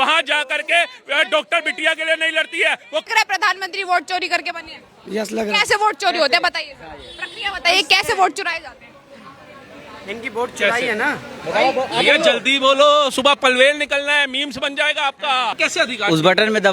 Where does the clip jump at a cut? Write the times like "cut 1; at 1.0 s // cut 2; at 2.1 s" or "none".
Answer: cut 1; at 3.1 s // cut 2; at 15.5 s